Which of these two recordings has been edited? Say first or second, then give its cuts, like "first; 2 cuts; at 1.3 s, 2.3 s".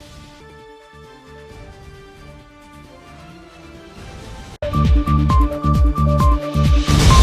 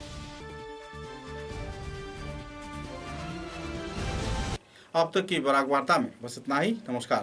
first; 1 cut; at 4.6 s